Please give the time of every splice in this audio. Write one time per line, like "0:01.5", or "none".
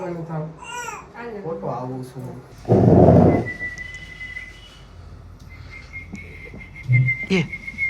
0:02.4

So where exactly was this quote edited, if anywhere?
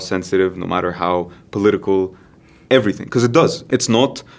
none

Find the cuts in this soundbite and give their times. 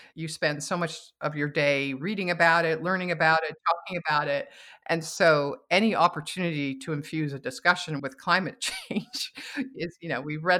0:08.0

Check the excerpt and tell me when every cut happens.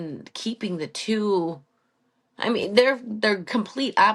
none

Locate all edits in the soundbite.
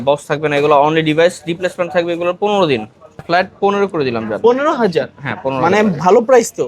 0:03.2

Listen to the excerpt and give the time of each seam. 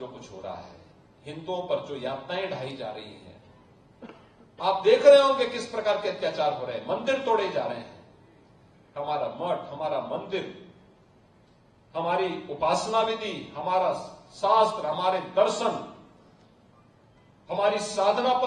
none

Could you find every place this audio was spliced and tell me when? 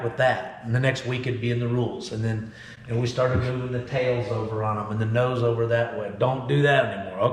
none

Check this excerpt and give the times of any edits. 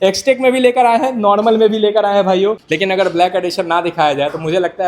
0:02.6

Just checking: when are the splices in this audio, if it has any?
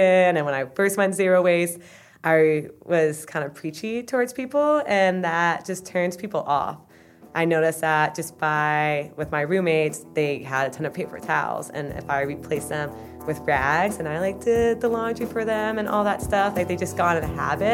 none

